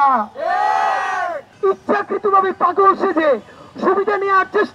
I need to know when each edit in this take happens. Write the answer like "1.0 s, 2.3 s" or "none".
1.4 s